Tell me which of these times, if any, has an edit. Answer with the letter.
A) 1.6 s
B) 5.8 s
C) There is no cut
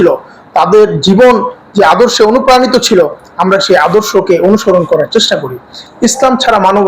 B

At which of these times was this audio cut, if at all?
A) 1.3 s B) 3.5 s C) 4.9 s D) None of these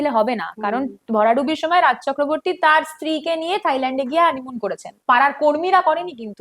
C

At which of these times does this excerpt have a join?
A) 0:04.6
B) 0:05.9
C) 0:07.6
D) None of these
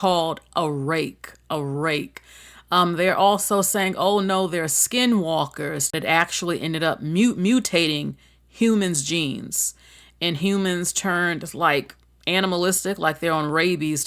B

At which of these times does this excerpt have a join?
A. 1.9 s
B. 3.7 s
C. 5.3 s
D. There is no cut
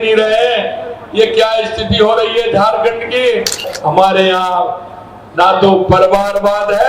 B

